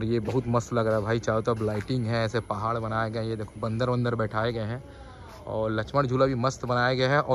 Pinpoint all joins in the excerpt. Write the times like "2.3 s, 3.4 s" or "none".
none